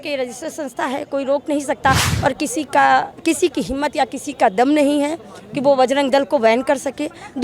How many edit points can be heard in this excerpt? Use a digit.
1